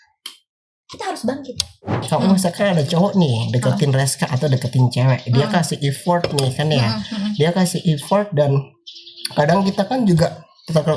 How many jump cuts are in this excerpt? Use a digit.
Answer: 1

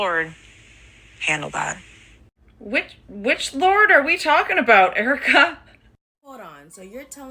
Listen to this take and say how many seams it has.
1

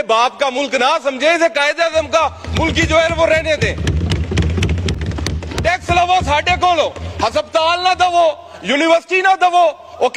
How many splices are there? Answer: 1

